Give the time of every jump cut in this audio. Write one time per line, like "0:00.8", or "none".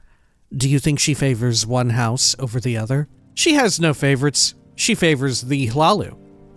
0:03.2